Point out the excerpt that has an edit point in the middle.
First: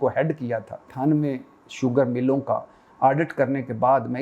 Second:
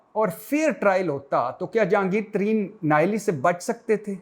first; 1 cut; at 0.9 s

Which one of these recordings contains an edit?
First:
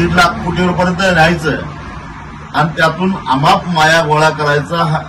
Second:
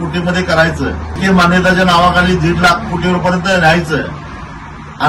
second; 1 cut; at 1.2 s

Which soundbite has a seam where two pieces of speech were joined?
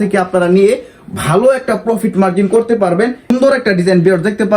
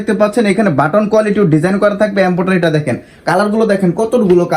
first; 1 cut; at 3.3 s

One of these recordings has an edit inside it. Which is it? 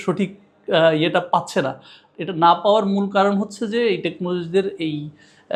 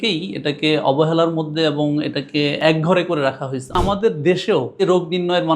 second; 3 cuts; at 2.6 s, 3.8 s, 4.8 s

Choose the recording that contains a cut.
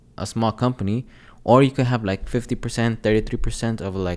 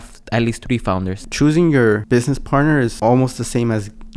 second; 2 cuts; at 1.1 s, 2.3 s

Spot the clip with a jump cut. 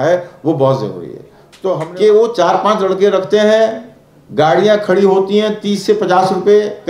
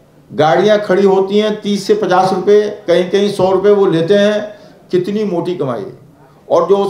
first; 1 cut; at 1.8 s

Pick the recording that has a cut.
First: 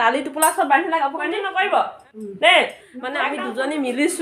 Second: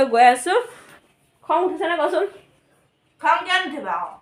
first; 2 cuts; at 1.4 s, 3.2 s

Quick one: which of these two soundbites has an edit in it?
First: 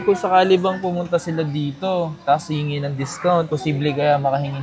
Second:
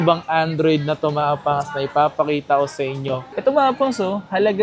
second; 1 cut; at 3.3 s

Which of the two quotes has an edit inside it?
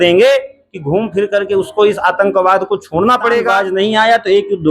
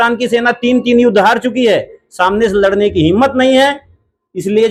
first; 1 cut; at 3.5 s

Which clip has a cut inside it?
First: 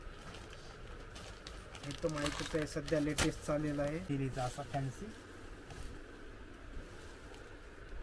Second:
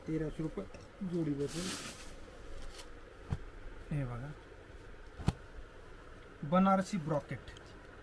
first; 1 cut; at 4.1 s

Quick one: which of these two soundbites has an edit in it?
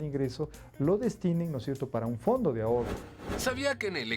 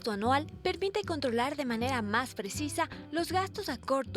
first; 1 cut; at 3.0 s

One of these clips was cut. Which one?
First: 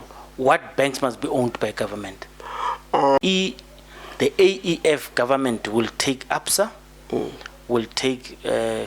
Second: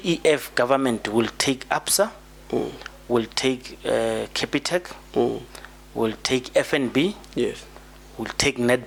first; 1 cut; at 3.2 s

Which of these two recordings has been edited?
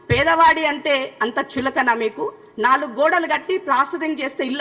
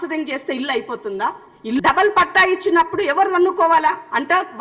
second; 1 cut; at 1.8 s

